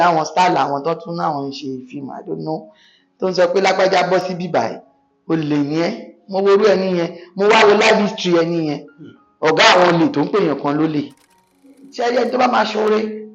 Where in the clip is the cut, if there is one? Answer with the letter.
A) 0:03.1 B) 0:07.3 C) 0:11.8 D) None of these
C